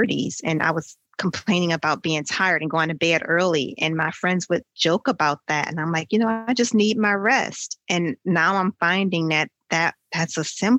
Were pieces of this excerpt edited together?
no; 0 cuts

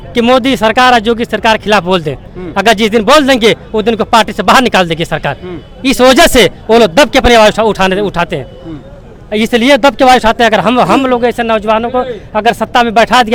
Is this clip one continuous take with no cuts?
yes; 0 cuts

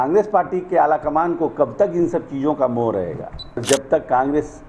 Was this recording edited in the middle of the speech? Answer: yes; 1 cut; at 3.6 s

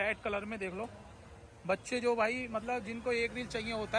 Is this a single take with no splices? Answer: yes; 0 cuts

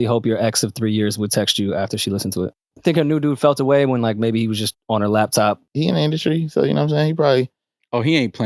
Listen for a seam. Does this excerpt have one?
yes; 2 cuts; at 2.7 s, 5.7 s

